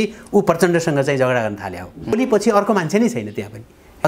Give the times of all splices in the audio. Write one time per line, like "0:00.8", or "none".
0:02.2